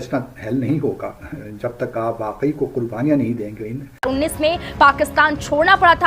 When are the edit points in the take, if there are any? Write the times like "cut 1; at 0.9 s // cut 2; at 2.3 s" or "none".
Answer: cut 1; at 4.1 s